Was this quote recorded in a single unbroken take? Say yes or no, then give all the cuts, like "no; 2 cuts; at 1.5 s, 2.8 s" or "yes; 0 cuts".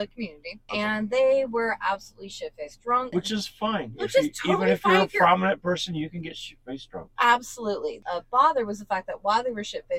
no; 2 cuts; at 3.1 s, 8.0 s